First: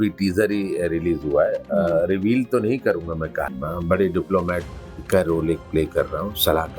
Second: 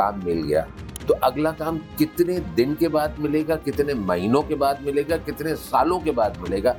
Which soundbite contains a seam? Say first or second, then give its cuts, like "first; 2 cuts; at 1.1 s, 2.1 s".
first; 1 cut; at 3.5 s